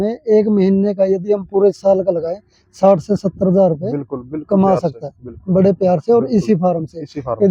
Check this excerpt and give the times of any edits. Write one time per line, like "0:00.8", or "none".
none